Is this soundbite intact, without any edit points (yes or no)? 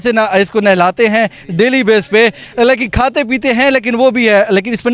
yes